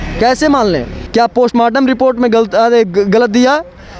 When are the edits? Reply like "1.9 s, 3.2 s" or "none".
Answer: 1.0 s